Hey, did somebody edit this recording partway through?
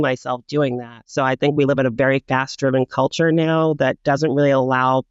yes; 1 cut; at 0.9 s

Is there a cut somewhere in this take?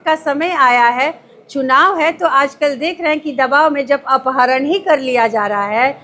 no; 0 cuts

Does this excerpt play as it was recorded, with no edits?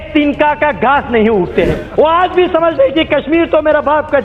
no; 1 cut; at 1.8 s

